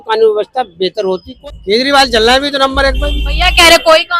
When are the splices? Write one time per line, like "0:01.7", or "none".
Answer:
0:01.3